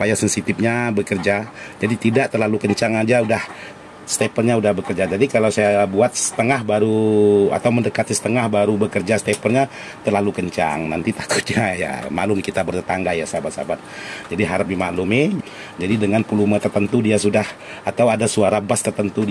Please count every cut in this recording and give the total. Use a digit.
1